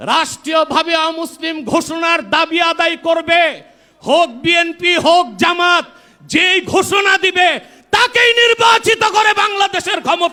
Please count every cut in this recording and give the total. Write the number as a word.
zero